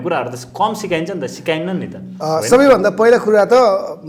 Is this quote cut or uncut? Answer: uncut